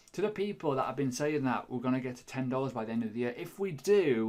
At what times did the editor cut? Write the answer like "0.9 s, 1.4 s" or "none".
none